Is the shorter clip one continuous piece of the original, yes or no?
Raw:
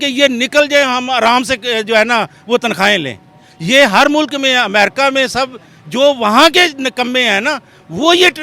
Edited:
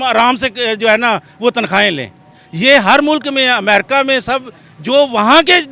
yes